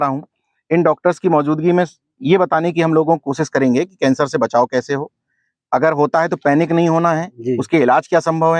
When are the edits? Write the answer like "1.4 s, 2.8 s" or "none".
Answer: none